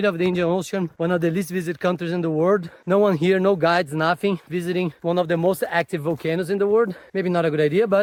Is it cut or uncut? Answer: uncut